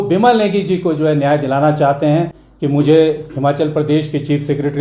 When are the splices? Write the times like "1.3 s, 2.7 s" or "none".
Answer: 2.4 s